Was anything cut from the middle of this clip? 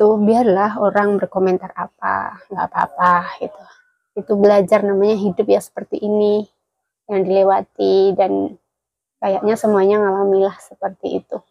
no; 0 cuts

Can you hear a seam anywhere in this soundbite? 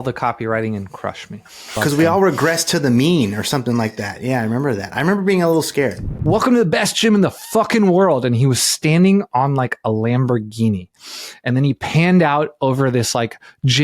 yes; 2 cuts; at 1.8 s, 6.1 s

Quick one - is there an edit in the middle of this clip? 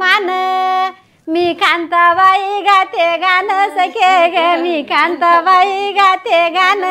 no; 0 cuts

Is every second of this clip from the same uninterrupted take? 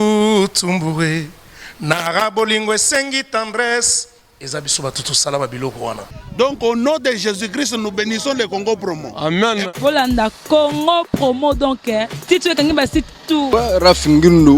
no; 2 cuts; at 6.2 s, 13.5 s

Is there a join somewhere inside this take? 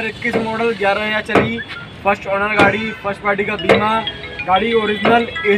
no; 0 cuts

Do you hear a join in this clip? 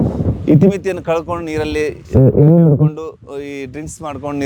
no; 0 cuts

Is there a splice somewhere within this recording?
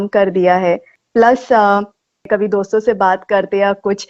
yes; 2 cuts; at 1.0 s, 2.3 s

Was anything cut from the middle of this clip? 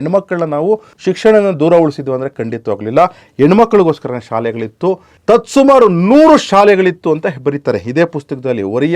yes; 1 cut; at 0.9 s

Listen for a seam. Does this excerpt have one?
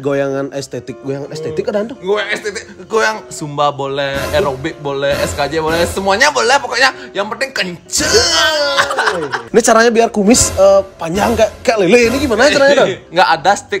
yes; 1 cut; at 9.4 s

